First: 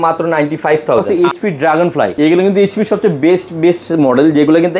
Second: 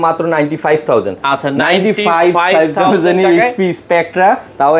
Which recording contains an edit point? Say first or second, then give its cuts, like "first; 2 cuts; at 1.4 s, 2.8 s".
first; 2 cuts; at 1.1 s, 2.1 s